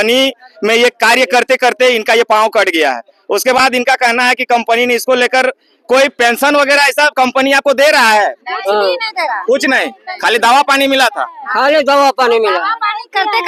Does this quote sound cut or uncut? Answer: uncut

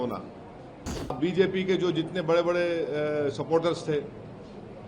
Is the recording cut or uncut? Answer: cut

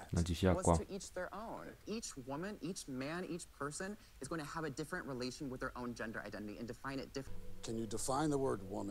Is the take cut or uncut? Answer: cut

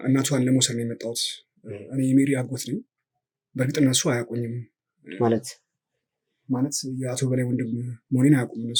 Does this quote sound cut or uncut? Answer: uncut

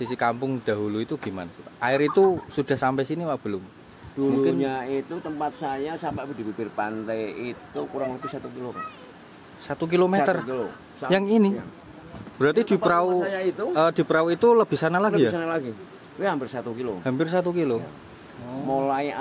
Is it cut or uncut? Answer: uncut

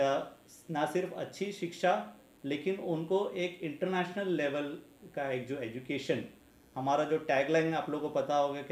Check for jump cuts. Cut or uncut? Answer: uncut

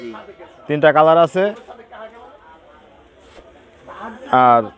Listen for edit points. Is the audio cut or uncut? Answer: uncut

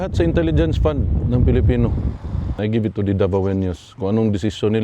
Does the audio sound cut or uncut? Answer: cut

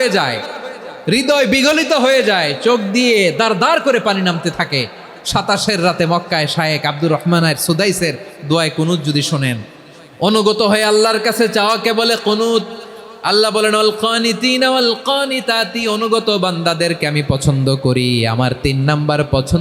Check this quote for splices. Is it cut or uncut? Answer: uncut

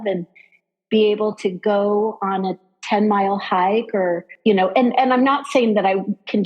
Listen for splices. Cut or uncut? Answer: cut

